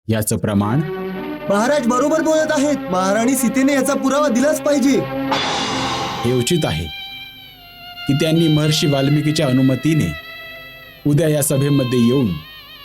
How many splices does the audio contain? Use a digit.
2